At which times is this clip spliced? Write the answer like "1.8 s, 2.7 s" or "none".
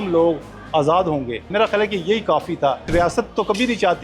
1.5 s, 2.9 s